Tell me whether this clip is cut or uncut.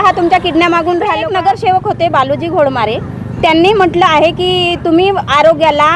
cut